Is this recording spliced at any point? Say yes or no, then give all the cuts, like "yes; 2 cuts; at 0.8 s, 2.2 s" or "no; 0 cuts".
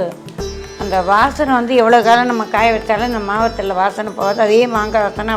no; 0 cuts